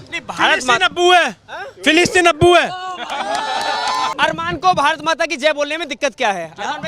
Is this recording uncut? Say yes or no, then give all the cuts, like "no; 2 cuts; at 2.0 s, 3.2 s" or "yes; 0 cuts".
no; 1 cut; at 4.1 s